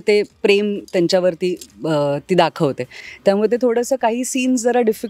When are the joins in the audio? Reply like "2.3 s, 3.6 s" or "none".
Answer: none

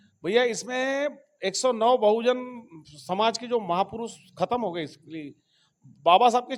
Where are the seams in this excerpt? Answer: none

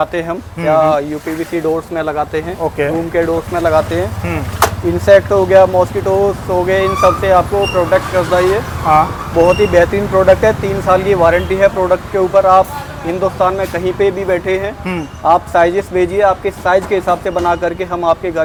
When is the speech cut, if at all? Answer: none

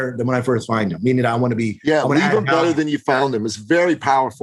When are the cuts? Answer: none

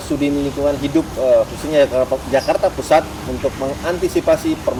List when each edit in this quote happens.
none

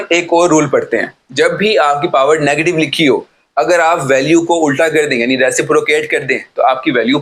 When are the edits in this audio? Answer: none

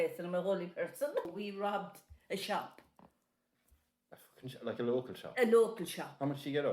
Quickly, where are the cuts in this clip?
1.3 s

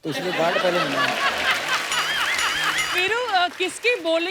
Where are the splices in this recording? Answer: 2.8 s

